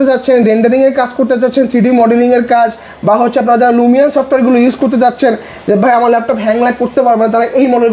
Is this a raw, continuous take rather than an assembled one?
yes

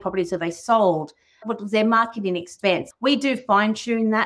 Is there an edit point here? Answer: yes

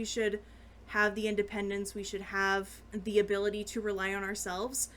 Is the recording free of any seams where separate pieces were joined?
no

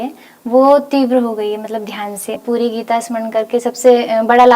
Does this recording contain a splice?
yes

